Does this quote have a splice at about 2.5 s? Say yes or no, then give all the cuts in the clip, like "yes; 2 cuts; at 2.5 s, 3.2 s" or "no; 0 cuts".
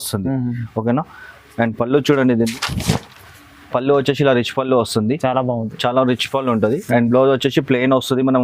yes; 1 cut; at 2.5 s